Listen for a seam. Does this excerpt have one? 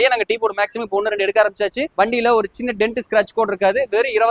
yes; 1 cut; at 1.8 s

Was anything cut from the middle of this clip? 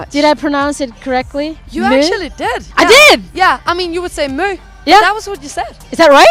no; 0 cuts

